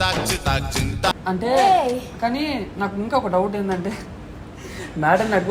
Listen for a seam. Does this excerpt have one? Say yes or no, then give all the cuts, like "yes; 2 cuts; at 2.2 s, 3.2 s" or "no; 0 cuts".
no; 0 cuts